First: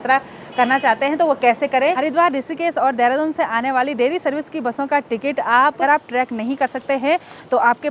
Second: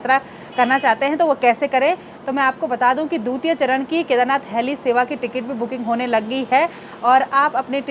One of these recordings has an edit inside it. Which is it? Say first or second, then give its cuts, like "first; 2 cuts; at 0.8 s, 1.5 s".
first; 2 cuts; at 2.0 s, 5.8 s